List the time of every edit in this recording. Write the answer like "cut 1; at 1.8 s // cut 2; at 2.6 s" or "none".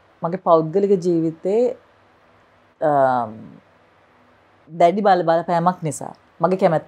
none